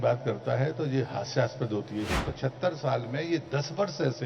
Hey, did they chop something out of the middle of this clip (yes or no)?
yes